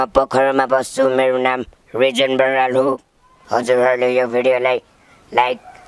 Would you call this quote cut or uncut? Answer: uncut